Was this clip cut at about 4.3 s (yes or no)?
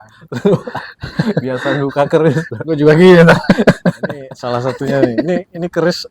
yes